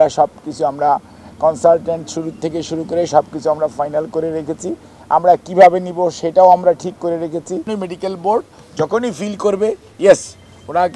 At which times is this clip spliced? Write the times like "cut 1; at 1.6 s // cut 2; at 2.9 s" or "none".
cut 1; at 7.7 s